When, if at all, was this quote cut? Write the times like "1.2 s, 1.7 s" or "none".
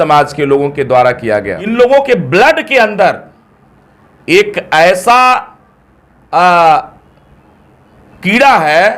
1.6 s